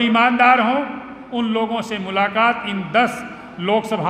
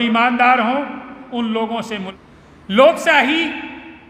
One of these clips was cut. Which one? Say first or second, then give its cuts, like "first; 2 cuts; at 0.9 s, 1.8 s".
second; 1 cut; at 2.1 s